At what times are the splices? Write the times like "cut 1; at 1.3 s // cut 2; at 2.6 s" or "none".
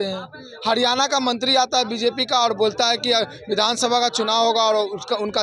none